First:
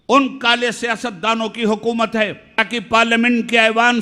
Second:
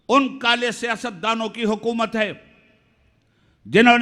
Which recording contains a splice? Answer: first; 1 cut; at 2.6 s

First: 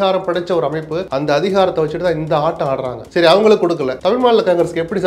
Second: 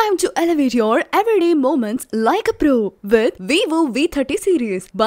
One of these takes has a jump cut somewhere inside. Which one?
first; 3 cuts; at 1.0 s, 3.0 s, 3.9 s

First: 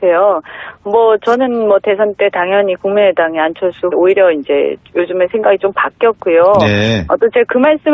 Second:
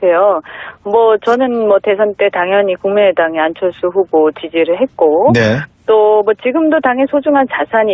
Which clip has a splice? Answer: second; 1 cut; at 3.9 s

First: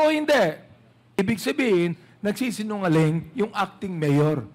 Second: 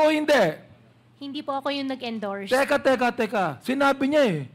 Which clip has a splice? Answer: first; 1 cut; at 1.2 s

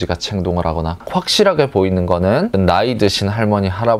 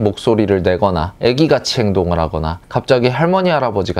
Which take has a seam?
first; 1 cut; at 1.0 s

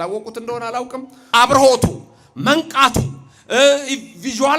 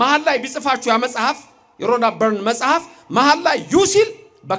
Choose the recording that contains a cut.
first; 1 cut; at 1.3 s

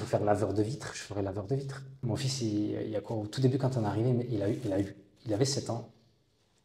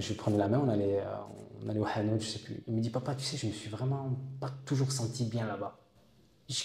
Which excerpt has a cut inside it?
first; 1 cut; at 2.0 s

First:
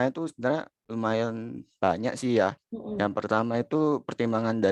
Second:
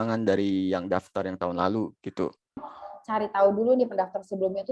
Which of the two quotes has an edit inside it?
second; 1 cut; at 2.6 s

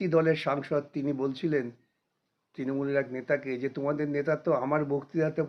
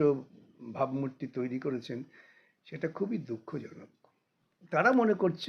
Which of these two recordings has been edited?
second; 1 cut; at 4.5 s

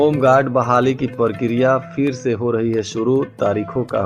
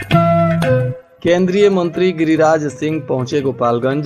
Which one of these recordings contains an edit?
second; 1 cut; at 1.0 s

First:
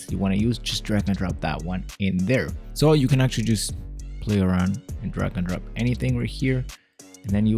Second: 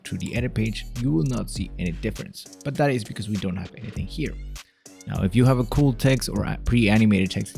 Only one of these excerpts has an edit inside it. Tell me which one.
first; 1 cut; at 2.6 s

